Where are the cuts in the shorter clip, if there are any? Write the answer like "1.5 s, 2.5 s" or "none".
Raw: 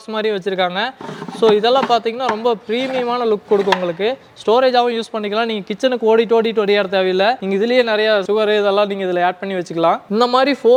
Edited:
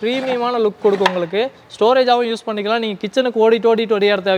none